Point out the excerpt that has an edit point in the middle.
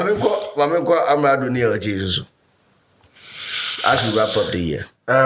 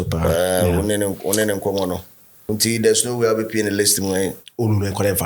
second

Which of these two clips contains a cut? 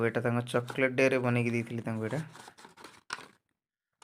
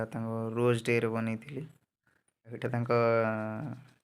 second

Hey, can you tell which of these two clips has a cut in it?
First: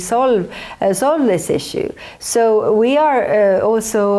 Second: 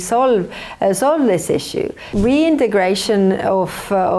second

